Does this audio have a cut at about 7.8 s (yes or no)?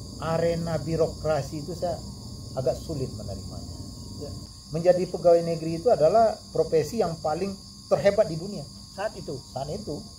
no